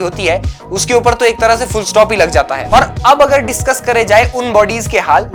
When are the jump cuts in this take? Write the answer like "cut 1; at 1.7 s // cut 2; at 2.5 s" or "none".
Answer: none